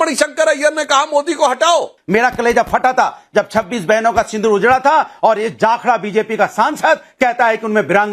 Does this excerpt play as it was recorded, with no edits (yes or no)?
no